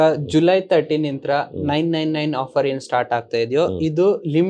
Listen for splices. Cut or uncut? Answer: uncut